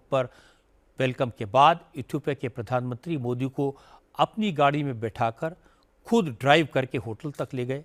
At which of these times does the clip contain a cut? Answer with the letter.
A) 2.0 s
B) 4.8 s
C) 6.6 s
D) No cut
D